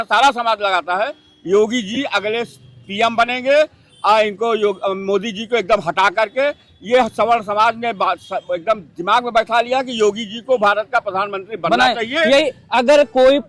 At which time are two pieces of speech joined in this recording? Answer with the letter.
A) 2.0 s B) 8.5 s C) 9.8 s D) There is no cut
D